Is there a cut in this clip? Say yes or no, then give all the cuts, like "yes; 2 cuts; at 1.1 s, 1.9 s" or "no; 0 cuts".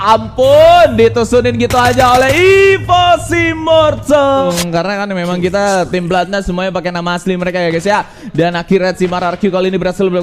yes; 1 cut; at 4.5 s